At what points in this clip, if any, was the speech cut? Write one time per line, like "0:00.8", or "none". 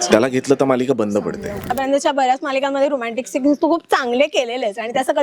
0:01.7